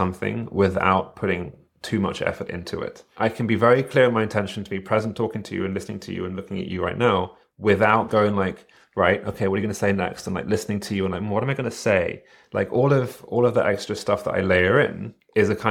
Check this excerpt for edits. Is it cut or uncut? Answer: cut